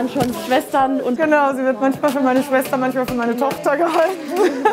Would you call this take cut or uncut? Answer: cut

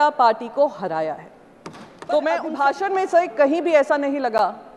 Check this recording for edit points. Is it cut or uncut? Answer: cut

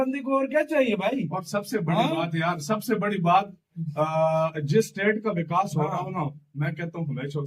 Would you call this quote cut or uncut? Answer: uncut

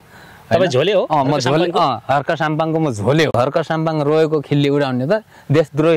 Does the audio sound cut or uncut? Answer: cut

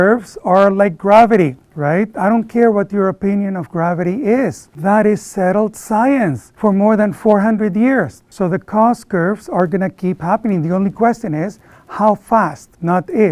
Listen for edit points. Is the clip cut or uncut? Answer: uncut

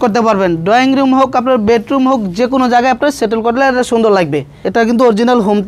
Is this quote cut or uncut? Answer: cut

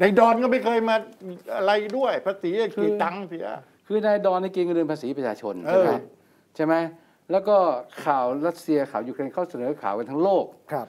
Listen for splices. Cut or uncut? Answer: uncut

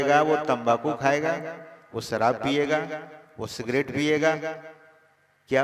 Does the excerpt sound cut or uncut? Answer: uncut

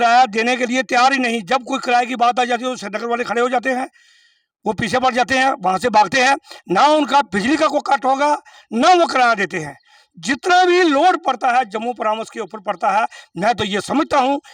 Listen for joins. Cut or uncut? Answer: uncut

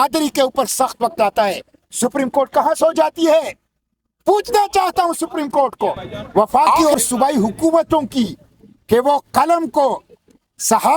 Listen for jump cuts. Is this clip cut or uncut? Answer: cut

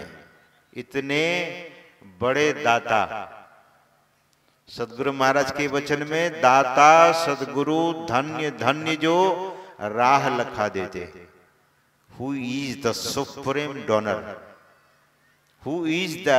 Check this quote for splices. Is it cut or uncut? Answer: uncut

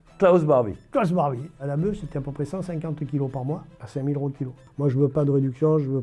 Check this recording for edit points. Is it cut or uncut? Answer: cut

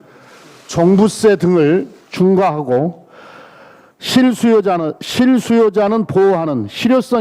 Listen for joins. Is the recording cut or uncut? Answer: cut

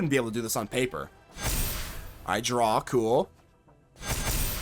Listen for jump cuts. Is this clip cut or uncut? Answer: cut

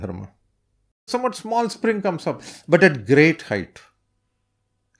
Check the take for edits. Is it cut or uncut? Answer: cut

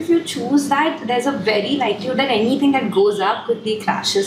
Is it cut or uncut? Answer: uncut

